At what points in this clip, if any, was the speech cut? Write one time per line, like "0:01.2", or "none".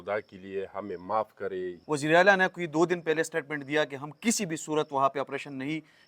0:01.7